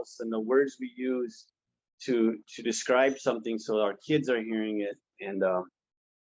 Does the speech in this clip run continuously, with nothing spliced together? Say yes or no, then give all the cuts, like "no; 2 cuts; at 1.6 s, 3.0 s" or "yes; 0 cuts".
yes; 0 cuts